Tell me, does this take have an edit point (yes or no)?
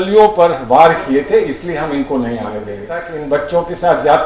yes